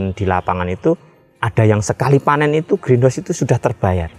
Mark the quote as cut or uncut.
uncut